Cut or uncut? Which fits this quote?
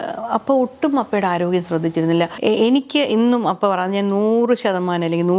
cut